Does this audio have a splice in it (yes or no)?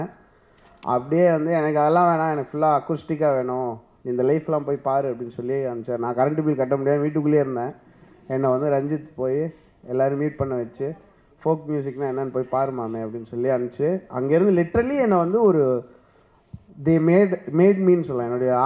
no